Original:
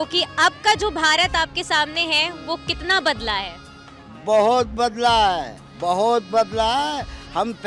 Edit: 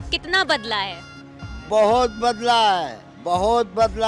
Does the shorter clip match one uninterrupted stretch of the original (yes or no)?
yes